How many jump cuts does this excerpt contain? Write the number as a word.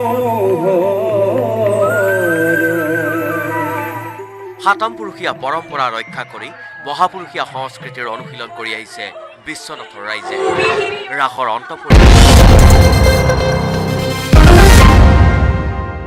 one